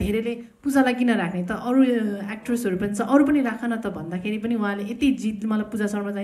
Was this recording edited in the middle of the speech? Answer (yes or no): no